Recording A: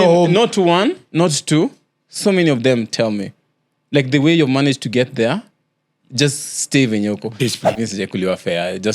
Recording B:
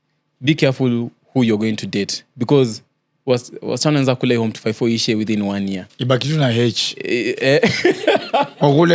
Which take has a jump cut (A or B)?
A